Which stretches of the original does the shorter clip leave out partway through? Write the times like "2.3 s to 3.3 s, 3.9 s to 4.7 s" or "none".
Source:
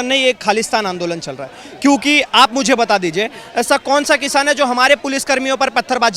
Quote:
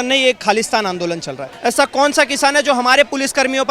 1.5 s to 3.4 s